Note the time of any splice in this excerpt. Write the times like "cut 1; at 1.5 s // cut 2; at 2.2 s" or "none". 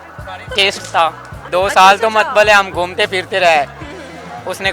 cut 1; at 1.3 s